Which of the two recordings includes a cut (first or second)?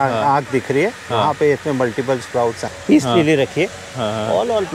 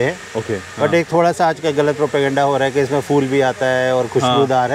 first